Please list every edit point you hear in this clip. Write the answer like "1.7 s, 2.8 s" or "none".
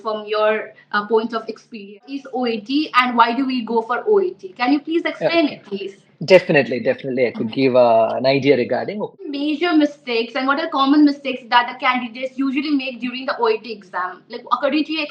2.3 s, 9.2 s